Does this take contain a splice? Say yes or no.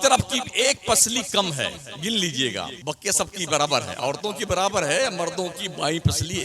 yes